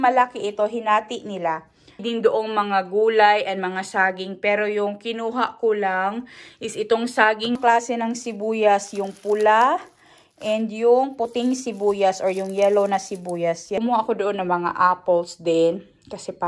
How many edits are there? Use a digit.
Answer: 3